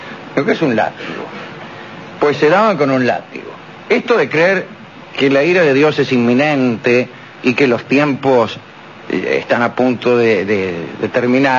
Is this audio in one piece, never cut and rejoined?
no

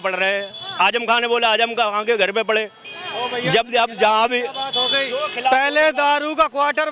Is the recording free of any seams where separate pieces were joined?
yes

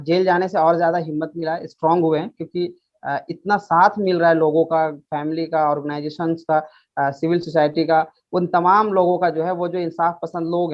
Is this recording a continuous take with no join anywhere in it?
yes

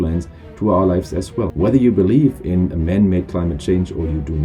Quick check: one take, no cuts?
no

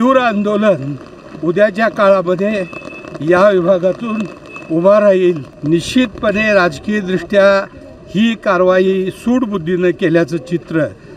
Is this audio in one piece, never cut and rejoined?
no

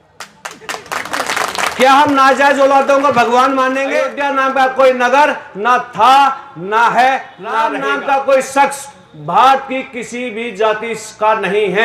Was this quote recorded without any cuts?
no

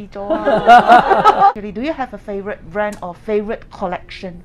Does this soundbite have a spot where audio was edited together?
no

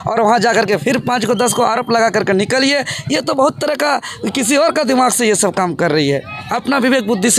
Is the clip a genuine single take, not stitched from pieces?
yes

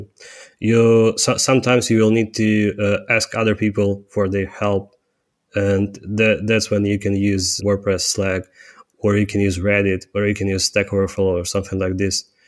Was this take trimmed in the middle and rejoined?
no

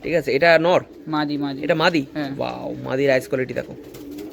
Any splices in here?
no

